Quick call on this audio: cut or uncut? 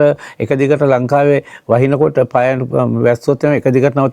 uncut